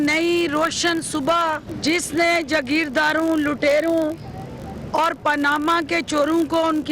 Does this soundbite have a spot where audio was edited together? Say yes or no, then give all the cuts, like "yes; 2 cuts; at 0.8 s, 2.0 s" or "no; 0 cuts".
yes; 1 cut; at 1.7 s